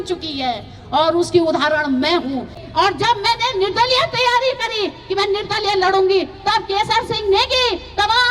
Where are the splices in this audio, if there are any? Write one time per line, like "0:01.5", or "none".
0:02.5